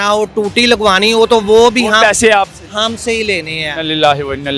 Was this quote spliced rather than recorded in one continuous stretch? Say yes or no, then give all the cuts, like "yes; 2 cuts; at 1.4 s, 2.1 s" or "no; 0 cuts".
no; 0 cuts